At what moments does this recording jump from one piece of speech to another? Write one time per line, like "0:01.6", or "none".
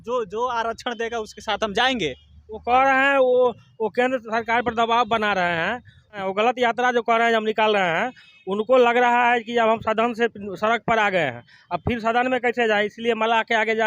0:06.2